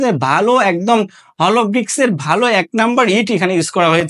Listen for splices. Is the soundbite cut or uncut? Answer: uncut